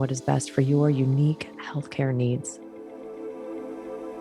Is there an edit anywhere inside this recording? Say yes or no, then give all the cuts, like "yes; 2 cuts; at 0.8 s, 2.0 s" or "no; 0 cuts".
yes; 1 cut; at 2.5 s